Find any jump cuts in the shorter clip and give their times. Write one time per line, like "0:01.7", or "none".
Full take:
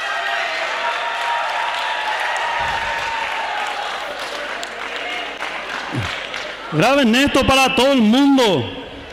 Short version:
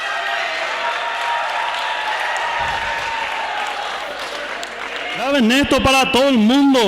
0:05.2